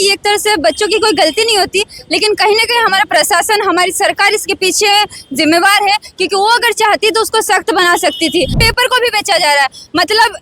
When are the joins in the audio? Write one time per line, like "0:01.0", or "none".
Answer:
0:08.6